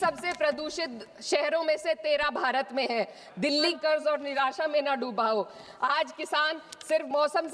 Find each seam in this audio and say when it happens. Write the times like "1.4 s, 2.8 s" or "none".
3.7 s

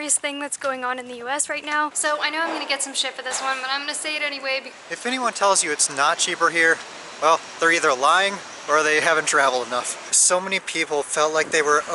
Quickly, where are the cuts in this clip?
2.0 s, 4.7 s, 10.0 s

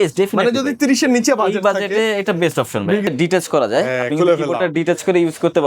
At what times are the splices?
3.1 s

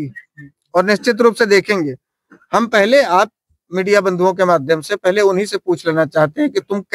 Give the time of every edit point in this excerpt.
none

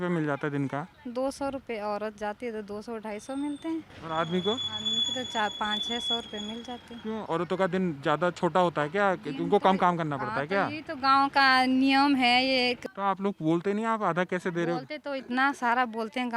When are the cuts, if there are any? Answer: 1.0 s, 3.9 s, 7.2 s, 12.8 s

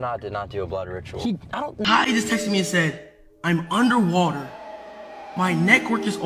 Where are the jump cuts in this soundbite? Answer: 1.8 s

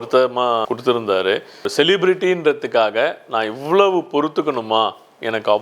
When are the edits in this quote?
1.7 s

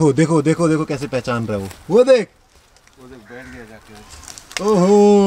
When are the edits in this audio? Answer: none

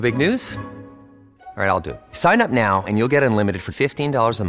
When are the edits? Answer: none

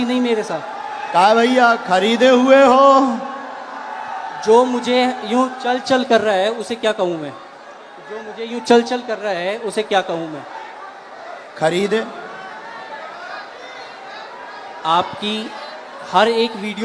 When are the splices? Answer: none

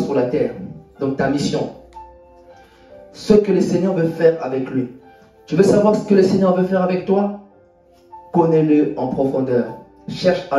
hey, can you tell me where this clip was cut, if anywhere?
none

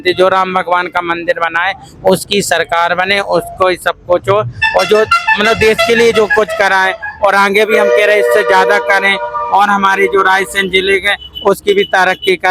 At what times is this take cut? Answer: none

